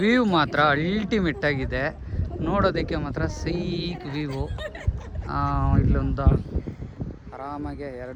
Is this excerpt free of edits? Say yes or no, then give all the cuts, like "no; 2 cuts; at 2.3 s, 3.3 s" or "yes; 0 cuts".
yes; 0 cuts